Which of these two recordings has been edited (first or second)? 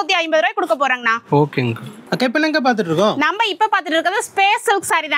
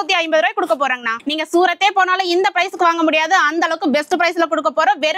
second